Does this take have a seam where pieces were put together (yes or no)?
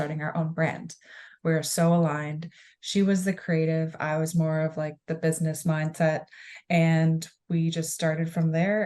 yes